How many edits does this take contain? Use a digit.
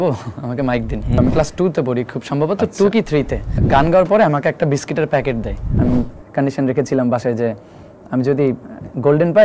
3